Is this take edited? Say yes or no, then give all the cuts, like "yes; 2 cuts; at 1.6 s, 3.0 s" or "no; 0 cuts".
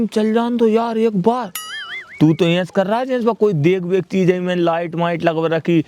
no; 0 cuts